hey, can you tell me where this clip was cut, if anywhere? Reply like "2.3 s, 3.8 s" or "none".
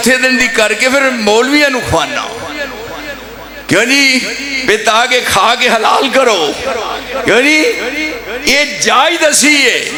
none